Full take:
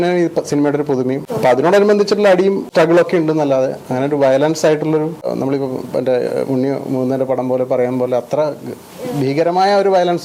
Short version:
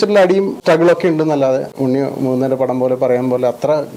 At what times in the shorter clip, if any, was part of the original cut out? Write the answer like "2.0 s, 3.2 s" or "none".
1.8 s